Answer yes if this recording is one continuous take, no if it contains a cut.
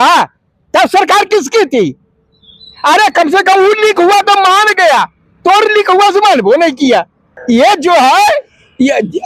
yes